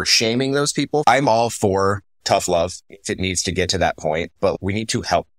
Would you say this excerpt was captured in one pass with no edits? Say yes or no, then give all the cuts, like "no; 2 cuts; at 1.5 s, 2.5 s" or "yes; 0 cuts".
no; 3 cuts; at 1.0 s, 2.9 s, 4.5 s